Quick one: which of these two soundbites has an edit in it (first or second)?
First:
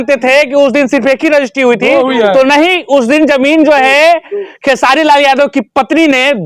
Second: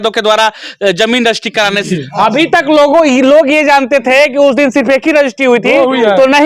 second